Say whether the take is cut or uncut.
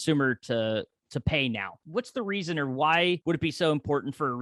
cut